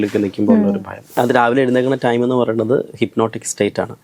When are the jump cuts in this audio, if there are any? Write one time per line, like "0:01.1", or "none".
0:01.2